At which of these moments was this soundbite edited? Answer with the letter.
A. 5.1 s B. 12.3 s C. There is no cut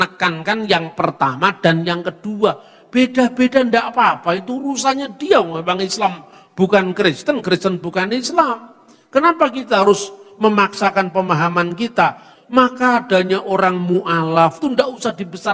B